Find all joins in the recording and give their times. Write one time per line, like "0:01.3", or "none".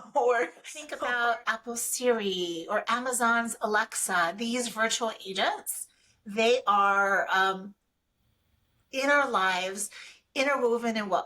0:00.9